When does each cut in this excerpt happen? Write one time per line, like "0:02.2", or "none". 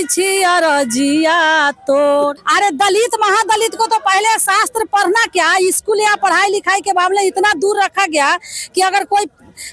0:02.3